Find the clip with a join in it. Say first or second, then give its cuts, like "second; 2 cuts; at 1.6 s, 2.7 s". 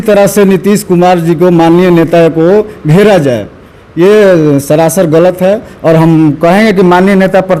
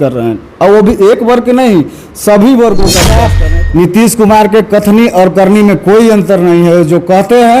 second; 1 cut; at 3.3 s